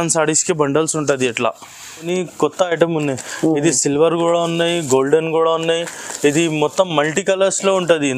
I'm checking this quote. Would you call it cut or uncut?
cut